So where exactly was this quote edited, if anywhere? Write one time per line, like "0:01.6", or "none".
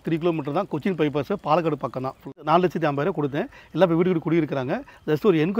0:02.3